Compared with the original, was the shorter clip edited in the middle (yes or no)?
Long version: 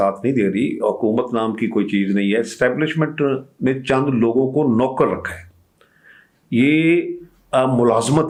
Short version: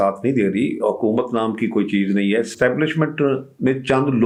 no